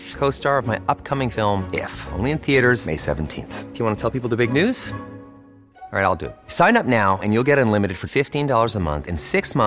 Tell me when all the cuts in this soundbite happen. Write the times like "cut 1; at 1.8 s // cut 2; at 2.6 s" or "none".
none